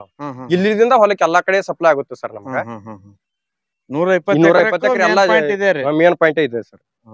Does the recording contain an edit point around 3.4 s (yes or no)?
no